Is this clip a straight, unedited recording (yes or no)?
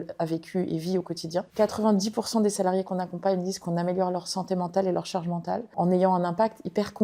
no